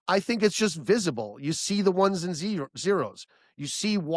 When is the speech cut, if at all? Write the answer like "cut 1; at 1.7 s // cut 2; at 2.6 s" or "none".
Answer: none